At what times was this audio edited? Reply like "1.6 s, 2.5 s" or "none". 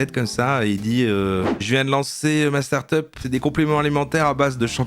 3.2 s